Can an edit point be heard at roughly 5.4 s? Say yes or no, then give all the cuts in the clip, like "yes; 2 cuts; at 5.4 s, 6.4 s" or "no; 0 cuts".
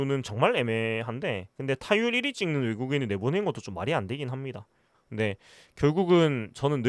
no; 0 cuts